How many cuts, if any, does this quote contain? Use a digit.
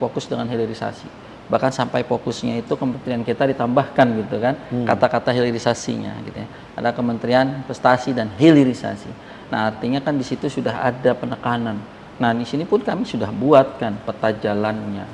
0